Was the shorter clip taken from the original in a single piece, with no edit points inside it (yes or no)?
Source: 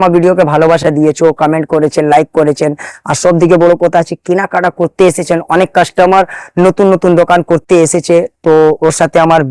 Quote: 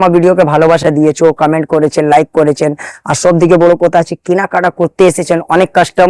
yes